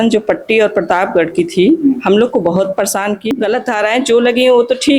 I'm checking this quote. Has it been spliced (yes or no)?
yes